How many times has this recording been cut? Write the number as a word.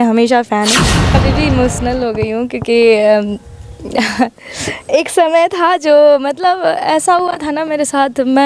one